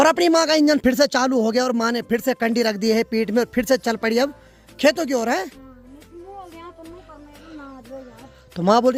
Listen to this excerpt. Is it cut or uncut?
uncut